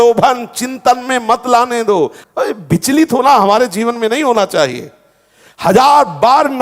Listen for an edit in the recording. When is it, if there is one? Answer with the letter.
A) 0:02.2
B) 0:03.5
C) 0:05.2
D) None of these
A